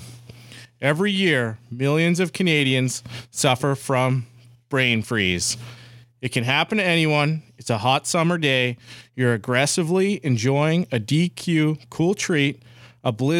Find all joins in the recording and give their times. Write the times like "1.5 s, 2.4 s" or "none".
none